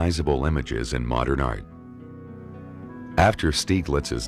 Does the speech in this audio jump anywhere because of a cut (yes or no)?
yes